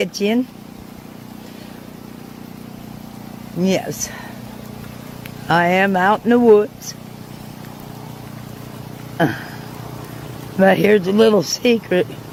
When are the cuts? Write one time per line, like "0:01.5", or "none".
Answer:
none